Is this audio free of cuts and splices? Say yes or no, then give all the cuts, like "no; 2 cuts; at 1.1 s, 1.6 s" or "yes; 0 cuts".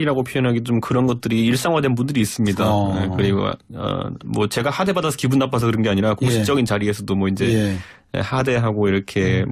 yes; 0 cuts